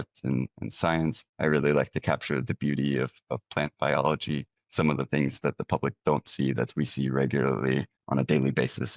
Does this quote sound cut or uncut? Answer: uncut